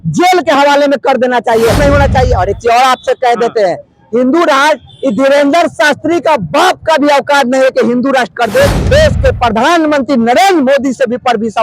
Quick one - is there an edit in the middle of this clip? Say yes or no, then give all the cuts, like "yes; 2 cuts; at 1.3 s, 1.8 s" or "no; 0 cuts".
yes; 2 cuts; at 1.8 s, 8.8 s